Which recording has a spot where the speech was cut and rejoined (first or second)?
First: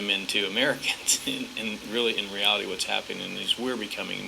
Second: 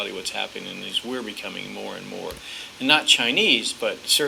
first